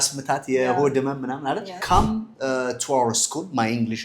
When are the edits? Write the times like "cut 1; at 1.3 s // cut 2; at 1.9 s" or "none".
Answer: cut 1; at 1.7 s